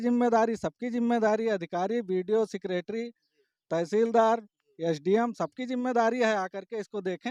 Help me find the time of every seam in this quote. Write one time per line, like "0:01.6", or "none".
none